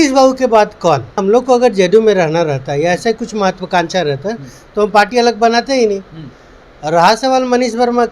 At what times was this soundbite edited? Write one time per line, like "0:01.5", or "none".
0:01.2